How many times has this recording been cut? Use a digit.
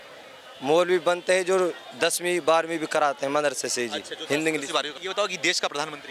1